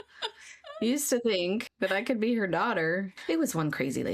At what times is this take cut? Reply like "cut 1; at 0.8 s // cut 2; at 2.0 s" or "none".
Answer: cut 1; at 1.7 s // cut 2; at 3.2 s